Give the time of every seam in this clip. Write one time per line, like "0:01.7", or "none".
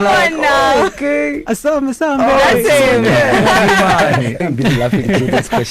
0:04.4